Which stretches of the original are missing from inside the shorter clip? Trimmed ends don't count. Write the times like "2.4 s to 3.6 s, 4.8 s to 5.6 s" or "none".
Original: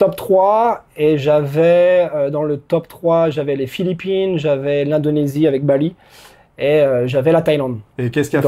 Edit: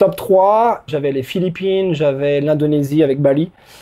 0.9 s to 3.4 s